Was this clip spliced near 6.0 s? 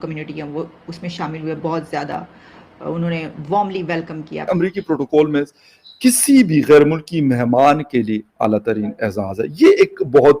no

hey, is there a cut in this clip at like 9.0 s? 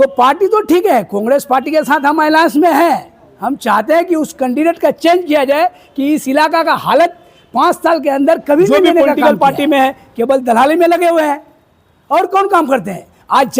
yes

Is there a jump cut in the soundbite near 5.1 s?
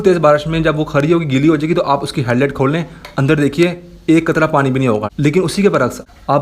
yes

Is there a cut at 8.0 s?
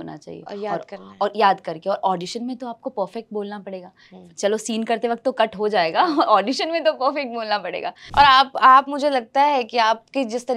yes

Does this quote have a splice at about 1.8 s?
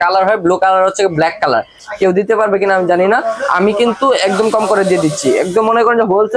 yes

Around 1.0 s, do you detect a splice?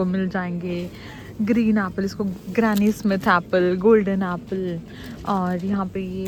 no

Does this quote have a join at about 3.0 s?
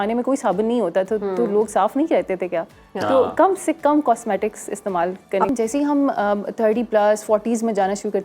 no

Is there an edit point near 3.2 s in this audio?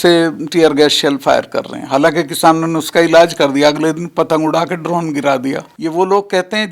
no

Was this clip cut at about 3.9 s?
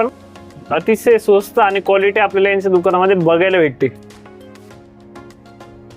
yes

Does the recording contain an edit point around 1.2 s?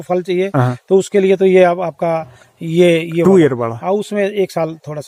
no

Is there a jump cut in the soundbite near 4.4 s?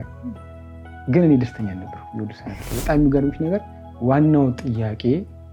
no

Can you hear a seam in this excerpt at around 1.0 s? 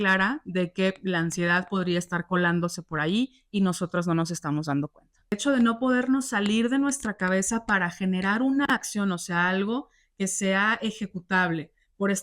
no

